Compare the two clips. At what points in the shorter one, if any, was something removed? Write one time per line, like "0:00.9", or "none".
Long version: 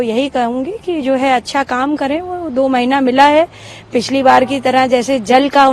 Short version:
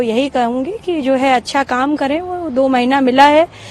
none